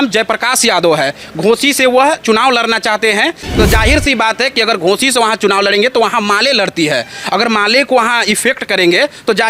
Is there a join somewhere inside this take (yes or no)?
yes